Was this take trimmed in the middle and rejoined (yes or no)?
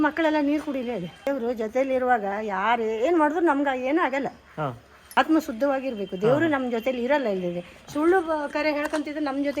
yes